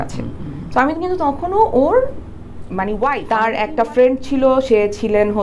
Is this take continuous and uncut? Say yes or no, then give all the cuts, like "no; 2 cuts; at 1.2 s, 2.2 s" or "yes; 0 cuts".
no; 1 cut; at 3.2 s